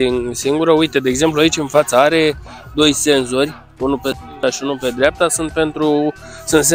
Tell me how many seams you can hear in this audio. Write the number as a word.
zero